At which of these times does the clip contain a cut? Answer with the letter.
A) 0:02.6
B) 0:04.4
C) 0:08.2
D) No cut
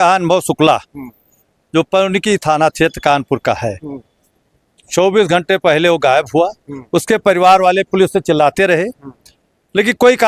D